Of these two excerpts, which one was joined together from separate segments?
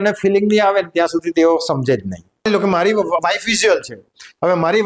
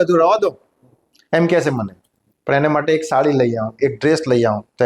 first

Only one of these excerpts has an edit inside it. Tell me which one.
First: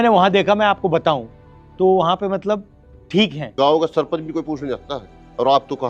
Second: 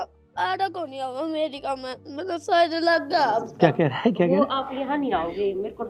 first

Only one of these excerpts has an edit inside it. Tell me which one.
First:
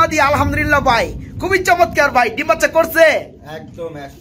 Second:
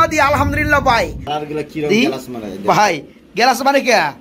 second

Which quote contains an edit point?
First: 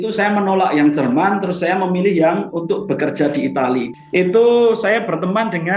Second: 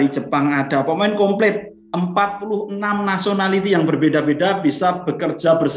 first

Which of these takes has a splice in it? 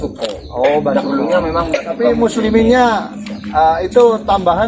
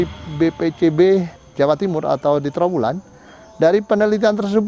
second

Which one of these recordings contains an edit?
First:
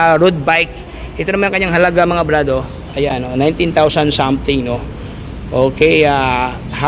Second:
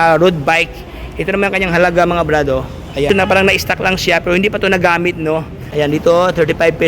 second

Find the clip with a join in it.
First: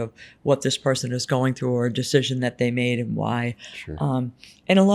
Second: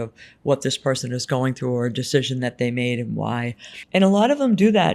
second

